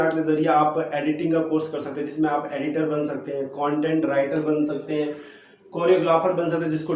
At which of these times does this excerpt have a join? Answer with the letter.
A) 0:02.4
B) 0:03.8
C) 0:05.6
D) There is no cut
D